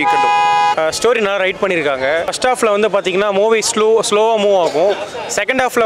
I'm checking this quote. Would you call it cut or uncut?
cut